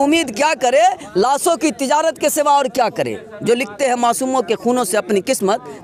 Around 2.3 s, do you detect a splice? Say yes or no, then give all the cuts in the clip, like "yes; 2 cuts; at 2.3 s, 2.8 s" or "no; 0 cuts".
no; 0 cuts